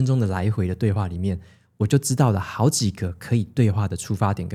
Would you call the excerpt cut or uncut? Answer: uncut